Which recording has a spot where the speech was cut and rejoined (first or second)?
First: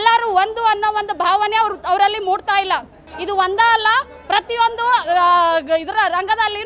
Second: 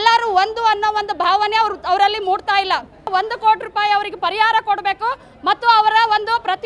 second